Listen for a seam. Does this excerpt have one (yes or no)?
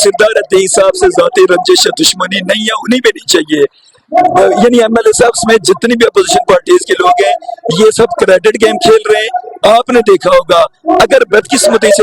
no